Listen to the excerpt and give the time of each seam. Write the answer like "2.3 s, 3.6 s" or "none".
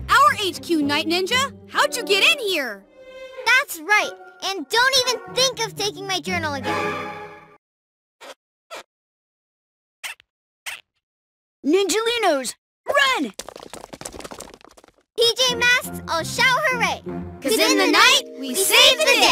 none